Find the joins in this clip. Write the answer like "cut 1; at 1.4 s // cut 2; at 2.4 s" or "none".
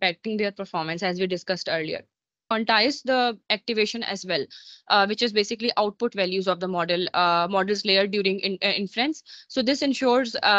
cut 1; at 2.4 s

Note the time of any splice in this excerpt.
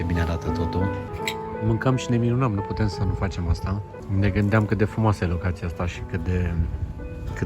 cut 1; at 1.1 s // cut 2; at 4.0 s

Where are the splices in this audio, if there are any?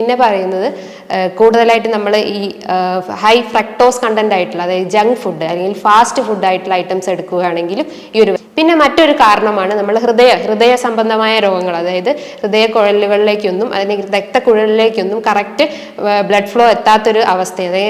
cut 1; at 8.4 s

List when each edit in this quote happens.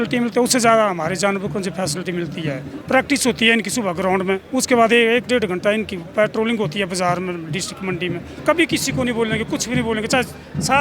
cut 1; at 2.7 s // cut 2; at 8.3 s

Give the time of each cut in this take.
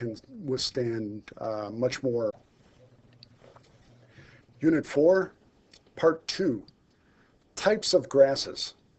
none

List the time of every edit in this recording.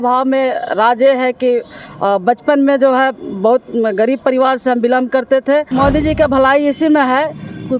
cut 1; at 5.7 s

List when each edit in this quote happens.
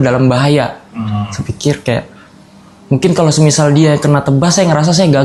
none

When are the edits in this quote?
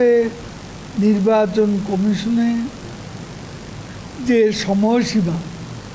none

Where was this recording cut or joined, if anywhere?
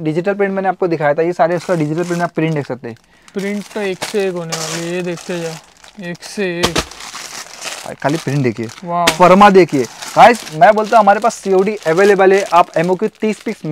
none

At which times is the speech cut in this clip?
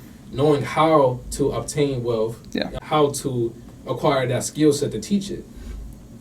cut 1; at 2.7 s

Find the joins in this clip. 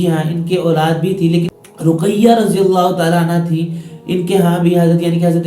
cut 1; at 1.6 s

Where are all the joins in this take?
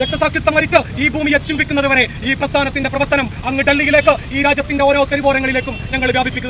none

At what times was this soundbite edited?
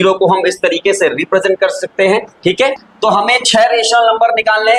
cut 1; at 2.9 s

